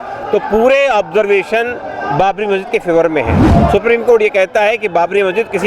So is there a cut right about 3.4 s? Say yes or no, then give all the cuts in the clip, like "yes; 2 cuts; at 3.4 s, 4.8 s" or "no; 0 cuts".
yes; 1 cut; at 3.4 s